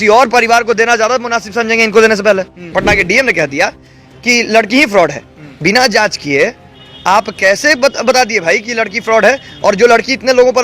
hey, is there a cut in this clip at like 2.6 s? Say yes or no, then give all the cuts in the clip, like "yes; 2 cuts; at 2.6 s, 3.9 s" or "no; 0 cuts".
yes; 1 cut; at 2.6 s